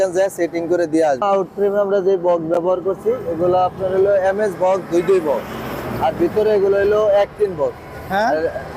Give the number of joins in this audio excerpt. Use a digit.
1